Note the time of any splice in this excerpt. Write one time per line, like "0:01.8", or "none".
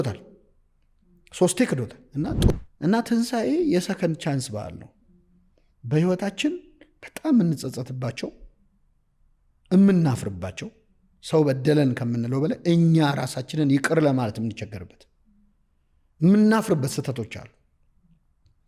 0:02.5